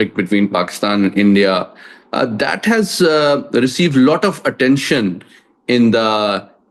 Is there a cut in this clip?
no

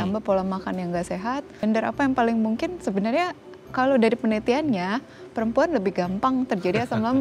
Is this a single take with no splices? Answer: no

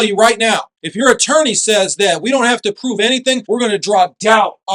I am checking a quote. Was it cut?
no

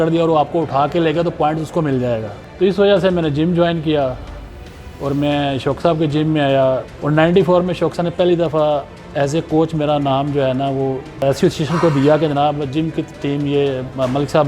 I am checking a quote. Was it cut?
yes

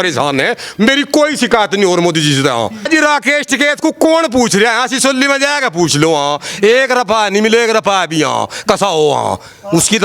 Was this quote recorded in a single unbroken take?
no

